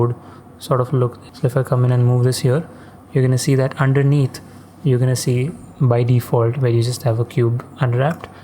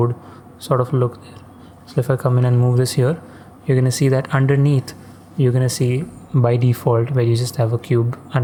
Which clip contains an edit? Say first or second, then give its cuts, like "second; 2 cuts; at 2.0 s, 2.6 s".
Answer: first; 1 cut; at 1.2 s